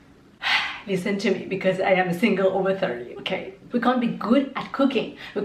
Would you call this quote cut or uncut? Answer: cut